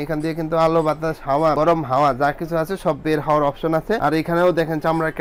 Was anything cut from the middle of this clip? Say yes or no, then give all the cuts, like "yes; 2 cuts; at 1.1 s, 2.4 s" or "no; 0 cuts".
no; 0 cuts